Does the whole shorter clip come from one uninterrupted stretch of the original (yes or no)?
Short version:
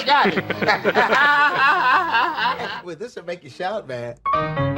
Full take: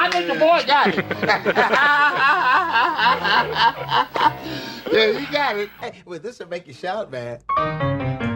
no